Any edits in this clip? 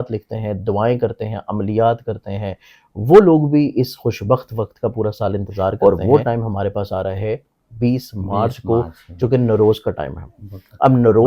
yes; 1 cut; at 5.8 s

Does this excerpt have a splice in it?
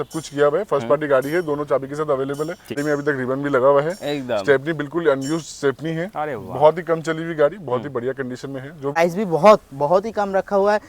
yes; 2 cuts; at 2.8 s, 9.0 s

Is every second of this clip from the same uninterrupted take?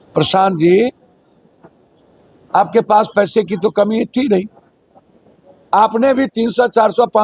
yes; 0 cuts

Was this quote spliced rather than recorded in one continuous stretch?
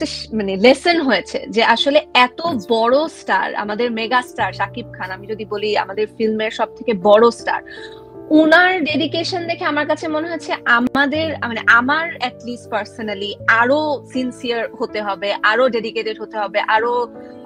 no; 0 cuts

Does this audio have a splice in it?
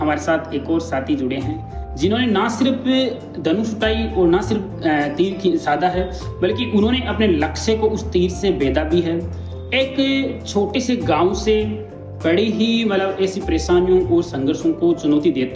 no; 0 cuts

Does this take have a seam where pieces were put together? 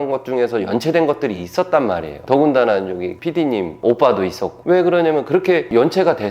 no; 0 cuts

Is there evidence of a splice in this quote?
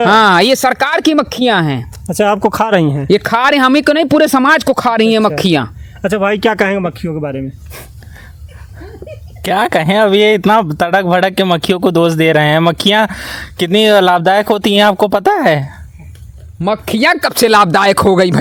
no; 0 cuts

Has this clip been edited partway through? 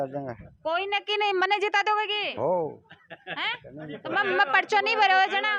no; 0 cuts

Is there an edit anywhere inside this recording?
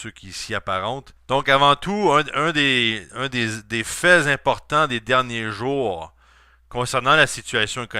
yes; 1 cut; at 2.8 s

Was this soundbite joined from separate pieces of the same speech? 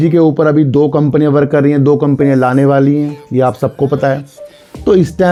no; 0 cuts

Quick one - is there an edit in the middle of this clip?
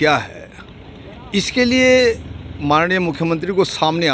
no; 0 cuts

